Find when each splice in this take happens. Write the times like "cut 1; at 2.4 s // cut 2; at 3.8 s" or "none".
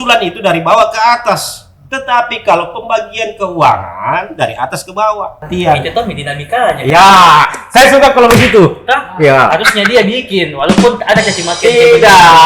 cut 1; at 5.4 s